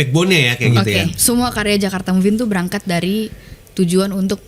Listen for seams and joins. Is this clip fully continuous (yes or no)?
no